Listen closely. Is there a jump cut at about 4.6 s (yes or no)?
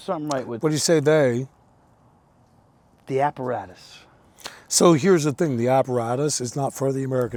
no